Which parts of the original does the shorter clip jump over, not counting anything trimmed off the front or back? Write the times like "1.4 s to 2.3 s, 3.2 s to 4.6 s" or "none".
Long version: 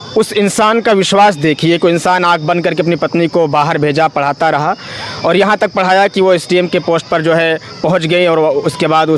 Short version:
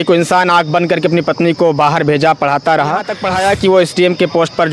4.9 s to 5.7 s